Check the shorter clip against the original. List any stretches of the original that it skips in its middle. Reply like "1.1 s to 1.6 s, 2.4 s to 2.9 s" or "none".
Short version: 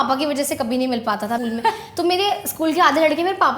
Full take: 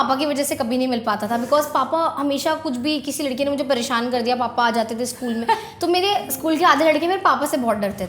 1.4 s to 5.2 s